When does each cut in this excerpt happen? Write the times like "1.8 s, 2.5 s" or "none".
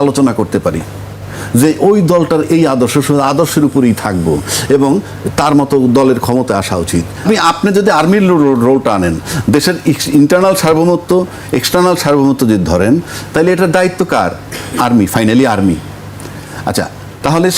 7.1 s